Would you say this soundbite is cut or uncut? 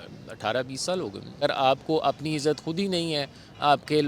cut